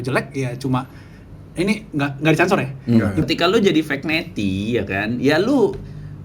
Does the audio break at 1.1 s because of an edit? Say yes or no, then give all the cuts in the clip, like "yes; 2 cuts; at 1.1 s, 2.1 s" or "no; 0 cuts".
no; 1 cut; at 3.2 s